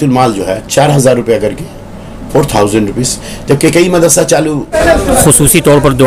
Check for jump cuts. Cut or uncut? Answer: cut